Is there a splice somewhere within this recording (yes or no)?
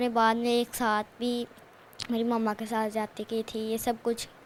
no